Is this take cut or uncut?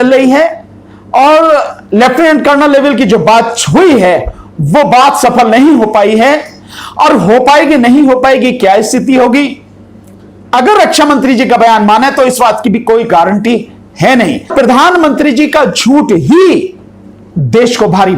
cut